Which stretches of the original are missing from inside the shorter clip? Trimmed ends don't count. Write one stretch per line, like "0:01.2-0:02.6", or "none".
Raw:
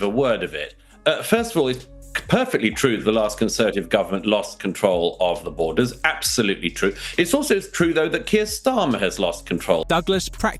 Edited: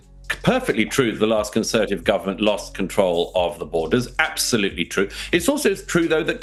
none